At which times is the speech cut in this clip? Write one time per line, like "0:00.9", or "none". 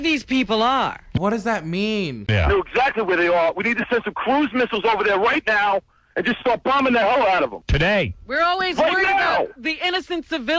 none